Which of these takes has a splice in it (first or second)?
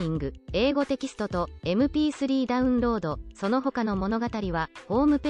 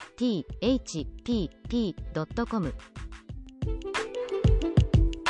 second